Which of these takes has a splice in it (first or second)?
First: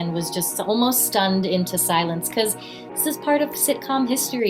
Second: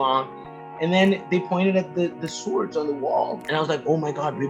second